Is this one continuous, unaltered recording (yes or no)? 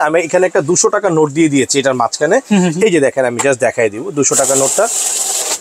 yes